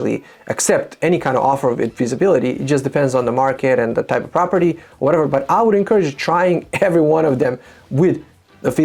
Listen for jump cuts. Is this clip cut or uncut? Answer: uncut